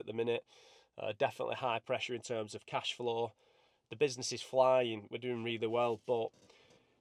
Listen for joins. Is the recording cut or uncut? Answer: uncut